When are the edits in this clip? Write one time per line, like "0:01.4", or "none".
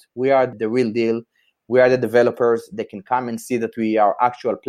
none